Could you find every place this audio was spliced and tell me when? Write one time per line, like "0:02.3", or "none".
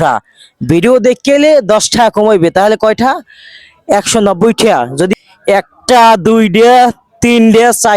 0:05.1